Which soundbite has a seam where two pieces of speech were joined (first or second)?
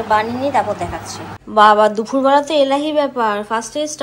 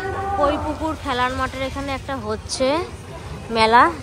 first